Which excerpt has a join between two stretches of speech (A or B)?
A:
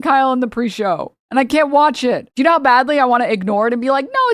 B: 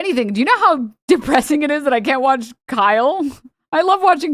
A